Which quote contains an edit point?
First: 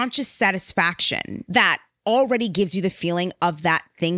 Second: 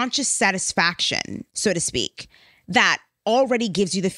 first; 1 cut; at 1.3 s

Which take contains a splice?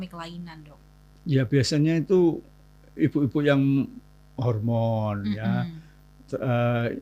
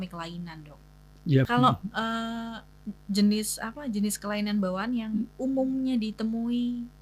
second; 1 cut; at 1.5 s

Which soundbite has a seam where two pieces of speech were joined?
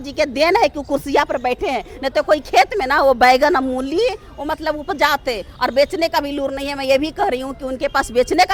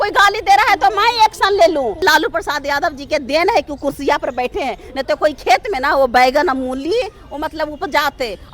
second; 1 cut; at 2.0 s

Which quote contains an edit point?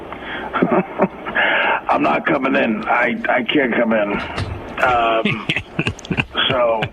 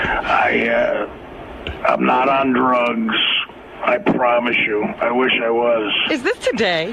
first; 1 cut; at 2.4 s

